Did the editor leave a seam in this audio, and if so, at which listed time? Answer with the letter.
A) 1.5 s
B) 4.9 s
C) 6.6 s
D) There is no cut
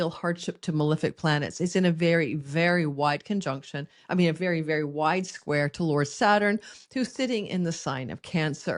D